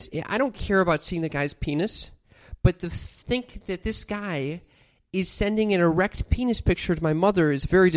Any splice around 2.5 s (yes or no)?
no